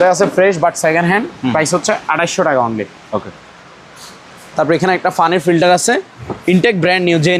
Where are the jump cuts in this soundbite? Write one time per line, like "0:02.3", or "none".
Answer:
none